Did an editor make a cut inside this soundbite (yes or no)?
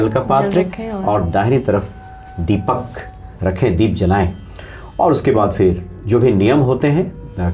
no